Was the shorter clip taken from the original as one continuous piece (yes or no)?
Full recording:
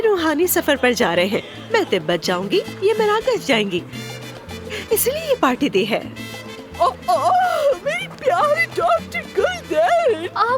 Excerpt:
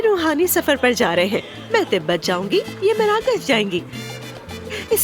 yes